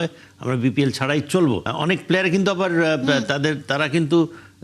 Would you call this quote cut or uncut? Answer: cut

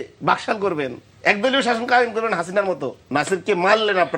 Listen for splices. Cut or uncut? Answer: cut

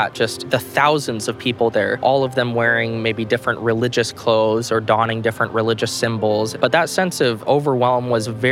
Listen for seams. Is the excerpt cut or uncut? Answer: cut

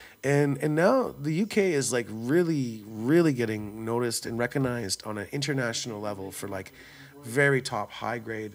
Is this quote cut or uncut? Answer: uncut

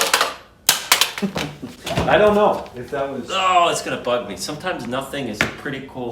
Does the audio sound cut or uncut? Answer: uncut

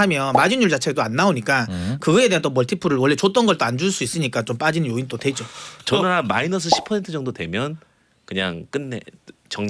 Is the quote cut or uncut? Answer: cut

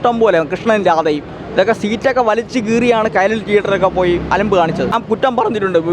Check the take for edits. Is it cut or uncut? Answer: cut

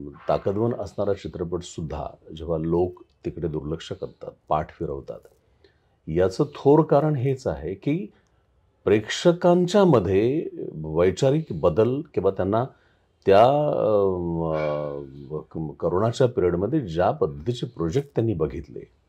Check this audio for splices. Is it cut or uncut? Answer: uncut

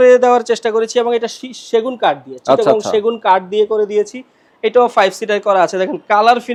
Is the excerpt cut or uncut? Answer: uncut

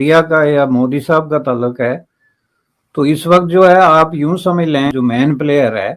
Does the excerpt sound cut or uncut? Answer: cut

